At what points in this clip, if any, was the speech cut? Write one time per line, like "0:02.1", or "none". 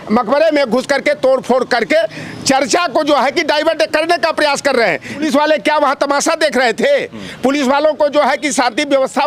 0:05.2